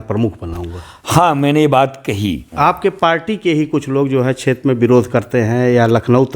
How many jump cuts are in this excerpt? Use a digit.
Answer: 1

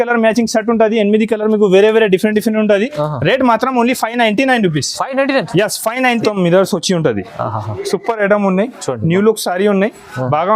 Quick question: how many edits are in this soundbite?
1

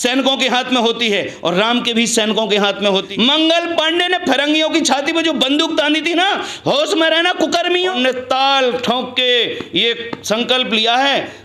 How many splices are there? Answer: 2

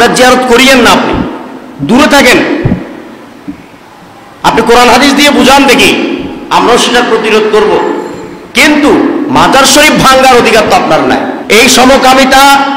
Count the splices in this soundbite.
1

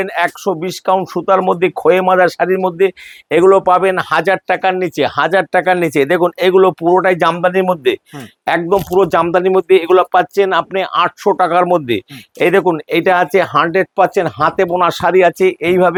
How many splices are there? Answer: 0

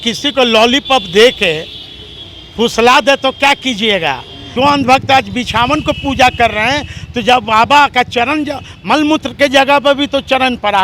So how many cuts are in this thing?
1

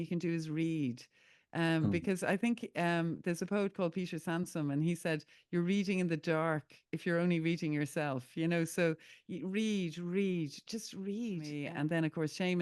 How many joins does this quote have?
1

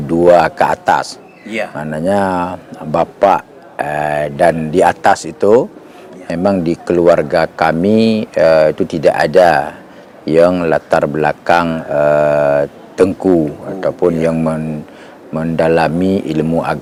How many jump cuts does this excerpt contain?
0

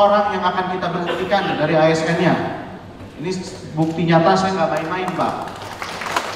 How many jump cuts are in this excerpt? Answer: 0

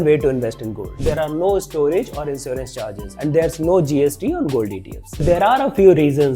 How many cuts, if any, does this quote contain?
3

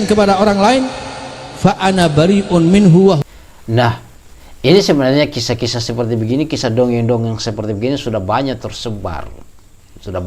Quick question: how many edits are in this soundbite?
1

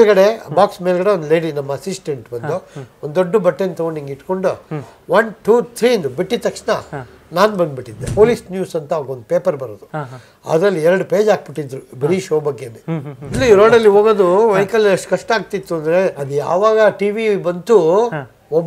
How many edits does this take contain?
3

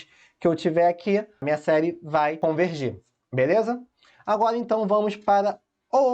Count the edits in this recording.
2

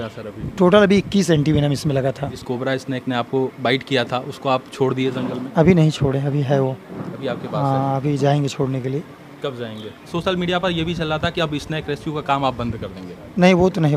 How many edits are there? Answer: 2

